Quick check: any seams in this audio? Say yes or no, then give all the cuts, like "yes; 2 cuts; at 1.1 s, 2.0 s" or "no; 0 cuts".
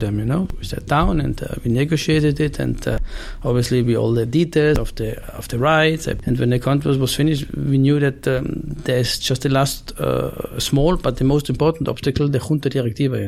no; 0 cuts